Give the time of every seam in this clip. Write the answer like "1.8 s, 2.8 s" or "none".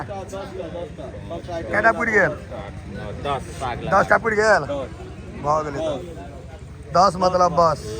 none